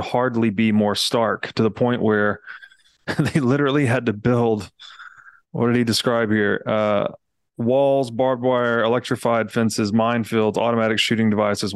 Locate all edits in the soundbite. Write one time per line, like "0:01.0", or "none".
none